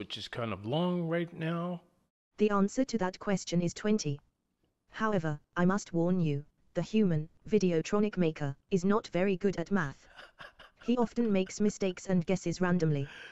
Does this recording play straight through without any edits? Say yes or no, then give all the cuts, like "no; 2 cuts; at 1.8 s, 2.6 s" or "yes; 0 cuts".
no; 1 cut; at 1.9 s